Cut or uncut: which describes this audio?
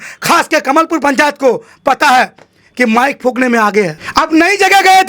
uncut